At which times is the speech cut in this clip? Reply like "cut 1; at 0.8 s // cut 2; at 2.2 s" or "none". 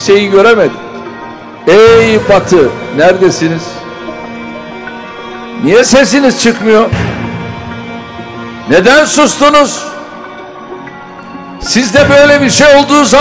cut 1; at 7.1 s // cut 2; at 8.7 s